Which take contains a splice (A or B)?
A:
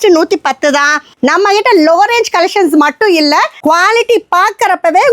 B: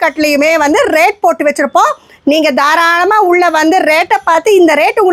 A